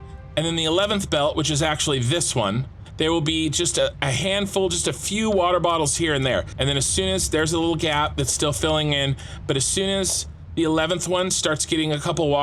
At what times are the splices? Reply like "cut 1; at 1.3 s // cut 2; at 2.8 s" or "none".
cut 1; at 2.8 s // cut 2; at 3.9 s // cut 3; at 6.5 s